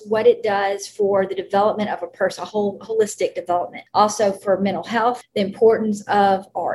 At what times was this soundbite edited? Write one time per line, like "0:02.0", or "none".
0:03.8
0:05.2